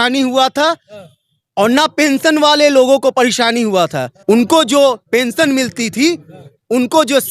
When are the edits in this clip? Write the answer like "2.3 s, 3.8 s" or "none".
4.1 s